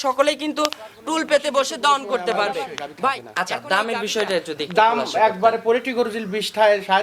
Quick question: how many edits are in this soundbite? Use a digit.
1